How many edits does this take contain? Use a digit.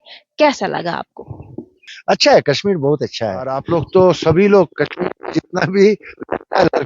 2